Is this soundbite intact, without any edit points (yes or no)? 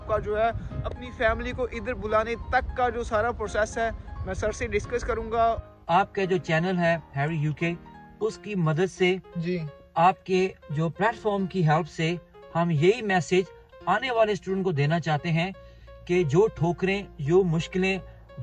no